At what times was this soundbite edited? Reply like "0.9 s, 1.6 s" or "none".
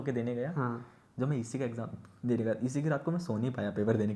none